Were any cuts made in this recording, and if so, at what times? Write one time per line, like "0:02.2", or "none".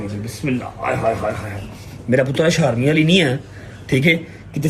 none